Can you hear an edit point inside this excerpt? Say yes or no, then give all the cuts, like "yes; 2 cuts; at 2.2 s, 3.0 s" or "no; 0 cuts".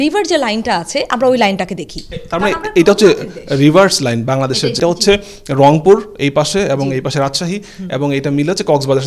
yes; 1 cut; at 4.8 s